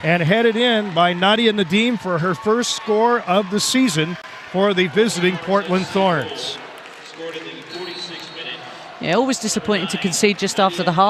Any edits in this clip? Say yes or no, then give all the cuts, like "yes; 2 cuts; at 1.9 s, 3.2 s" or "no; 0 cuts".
no; 0 cuts